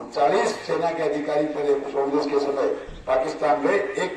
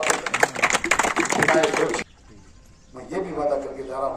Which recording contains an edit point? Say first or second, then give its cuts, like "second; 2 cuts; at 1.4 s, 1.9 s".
second; 1 cut; at 2.0 s